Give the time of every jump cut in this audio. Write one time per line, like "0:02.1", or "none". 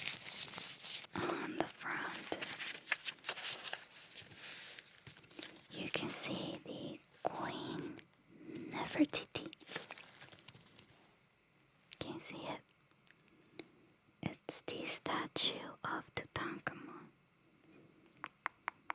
0:00.9
0:10.9